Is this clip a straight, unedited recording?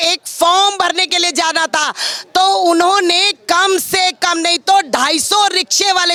yes; 0 cuts

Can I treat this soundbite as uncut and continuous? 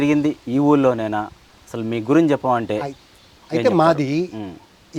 yes; 0 cuts

